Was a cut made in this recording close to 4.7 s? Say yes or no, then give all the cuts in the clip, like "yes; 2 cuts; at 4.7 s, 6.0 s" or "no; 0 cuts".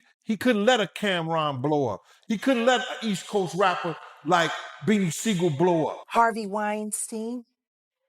no; 1 cut; at 6.0 s